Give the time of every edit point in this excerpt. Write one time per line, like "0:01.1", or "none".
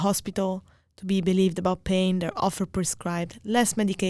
none